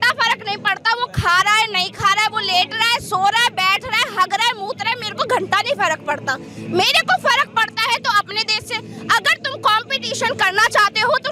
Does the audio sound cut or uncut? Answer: uncut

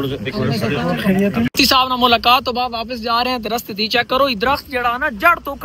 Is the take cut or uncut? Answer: cut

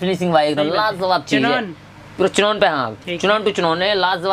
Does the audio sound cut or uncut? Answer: uncut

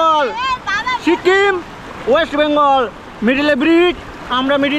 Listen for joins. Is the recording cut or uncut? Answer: uncut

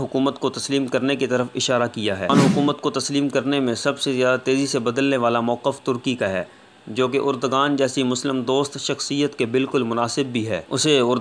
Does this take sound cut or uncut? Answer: cut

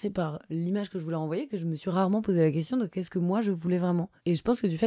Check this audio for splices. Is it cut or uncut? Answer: uncut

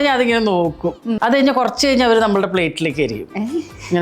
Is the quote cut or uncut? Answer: cut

